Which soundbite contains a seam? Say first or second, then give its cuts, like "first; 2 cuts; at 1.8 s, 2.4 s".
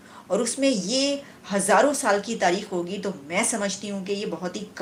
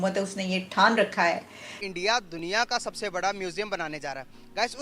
second; 1 cut; at 1.9 s